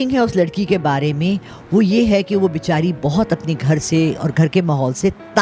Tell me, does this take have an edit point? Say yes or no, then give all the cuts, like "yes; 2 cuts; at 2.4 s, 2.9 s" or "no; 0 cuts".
no; 0 cuts